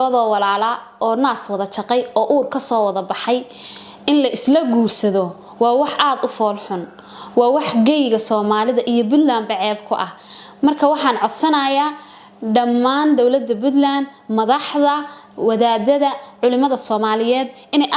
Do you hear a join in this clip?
no; 0 cuts

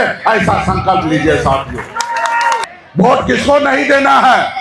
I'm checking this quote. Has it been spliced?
yes; 1 cut; at 2.7 s

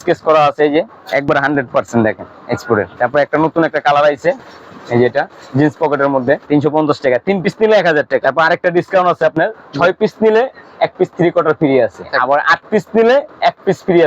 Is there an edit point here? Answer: yes; 5 cuts; at 1.0 s, 2.9 s, 6.4 s, 8.2 s, 12.1 s

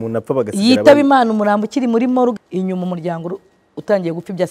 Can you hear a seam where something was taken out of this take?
yes; 1 cut; at 2.3 s

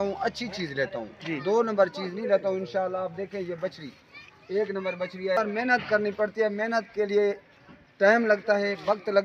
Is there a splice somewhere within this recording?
yes; 1 cut; at 5.4 s

